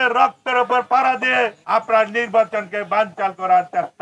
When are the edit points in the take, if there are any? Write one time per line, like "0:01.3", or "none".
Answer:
0:01.6